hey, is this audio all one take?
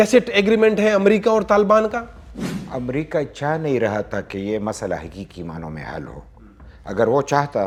yes; 0 cuts

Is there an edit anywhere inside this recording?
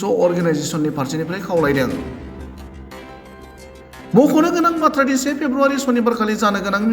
yes; 2 cuts; at 2.3 s, 4.1 s

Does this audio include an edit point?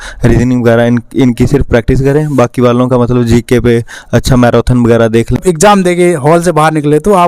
yes; 1 cut; at 5.4 s

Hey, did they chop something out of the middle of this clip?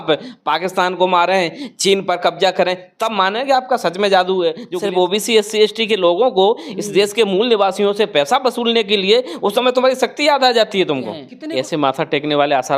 yes; 2 cuts; at 4.7 s, 11.3 s

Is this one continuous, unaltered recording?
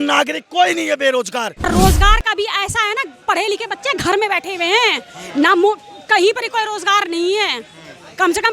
no; 1 cut; at 1.6 s

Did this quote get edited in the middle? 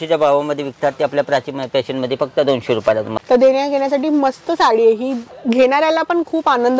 yes; 1 cut; at 3.1 s

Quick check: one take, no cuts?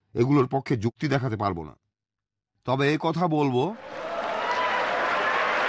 yes; 0 cuts

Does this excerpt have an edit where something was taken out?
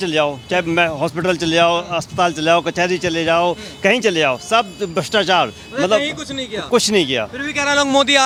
no; 0 cuts

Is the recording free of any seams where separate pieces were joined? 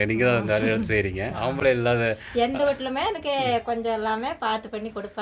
yes; 0 cuts

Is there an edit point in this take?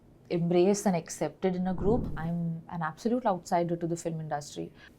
yes; 1 cut; at 2.0 s

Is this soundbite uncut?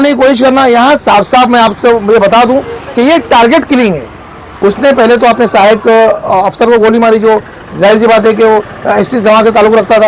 no; 1 cut; at 4.4 s

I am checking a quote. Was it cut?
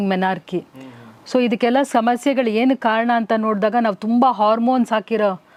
no; 0 cuts

